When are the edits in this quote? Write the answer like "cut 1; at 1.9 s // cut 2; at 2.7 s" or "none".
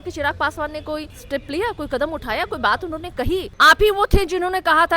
cut 1; at 1.2 s // cut 2; at 3.5 s